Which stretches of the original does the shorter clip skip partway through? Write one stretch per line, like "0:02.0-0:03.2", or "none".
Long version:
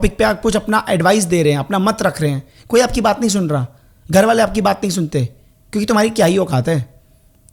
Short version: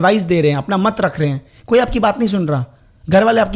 none